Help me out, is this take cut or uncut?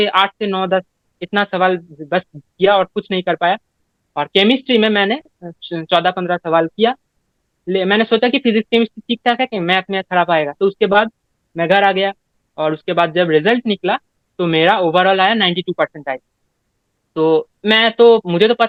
uncut